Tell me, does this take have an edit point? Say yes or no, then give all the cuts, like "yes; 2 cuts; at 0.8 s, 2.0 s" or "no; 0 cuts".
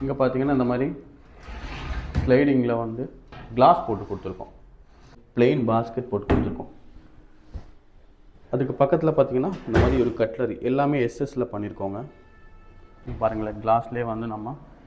yes; 2 cuts; at 5.2 s, 13.0 s